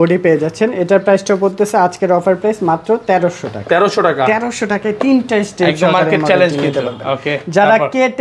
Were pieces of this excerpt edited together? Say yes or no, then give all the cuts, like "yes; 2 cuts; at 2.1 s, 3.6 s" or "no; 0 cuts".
no; 0 cuts